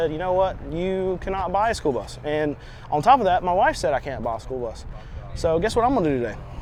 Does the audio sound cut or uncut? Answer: uncut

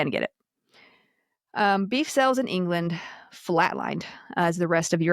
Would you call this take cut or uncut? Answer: uncut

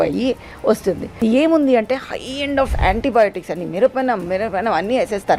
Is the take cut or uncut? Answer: cut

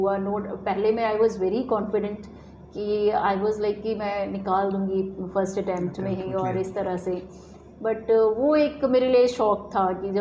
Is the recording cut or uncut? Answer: uncut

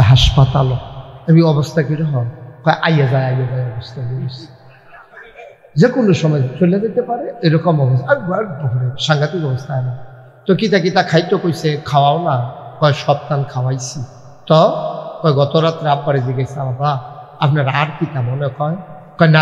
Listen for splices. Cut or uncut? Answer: uncut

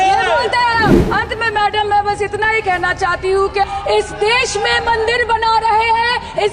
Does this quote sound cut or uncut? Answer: cut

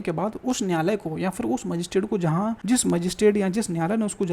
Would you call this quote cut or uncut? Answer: cut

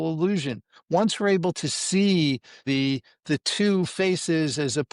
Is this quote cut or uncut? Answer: cut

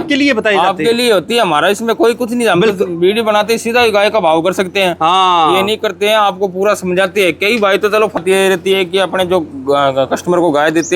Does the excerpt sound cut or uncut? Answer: cut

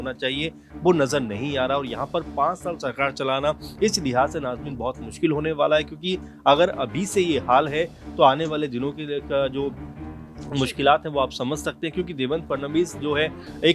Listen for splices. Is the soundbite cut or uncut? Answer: uncut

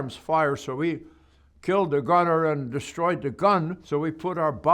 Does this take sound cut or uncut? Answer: cut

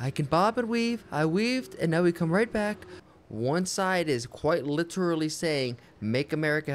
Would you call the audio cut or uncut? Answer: cut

